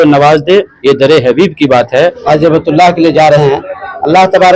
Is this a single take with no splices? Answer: no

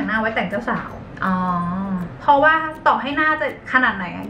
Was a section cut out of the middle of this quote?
no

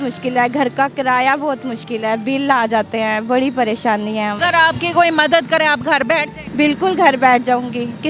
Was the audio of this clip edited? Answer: yes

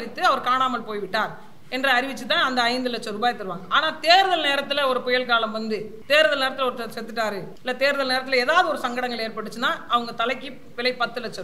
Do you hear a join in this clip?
yes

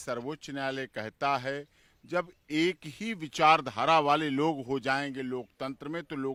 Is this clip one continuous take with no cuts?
yes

